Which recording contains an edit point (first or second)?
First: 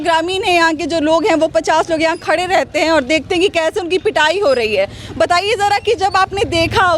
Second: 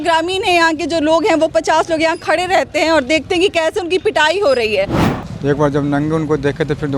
second